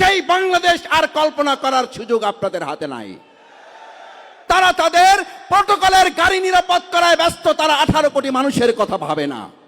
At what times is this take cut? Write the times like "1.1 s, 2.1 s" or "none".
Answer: 4.4 s